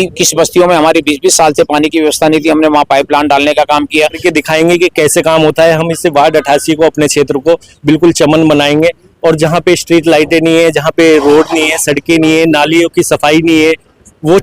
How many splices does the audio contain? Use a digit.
1